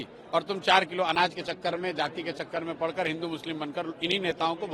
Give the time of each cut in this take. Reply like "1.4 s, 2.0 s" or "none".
none